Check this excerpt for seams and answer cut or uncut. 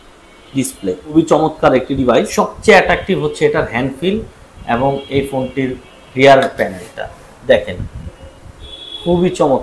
cut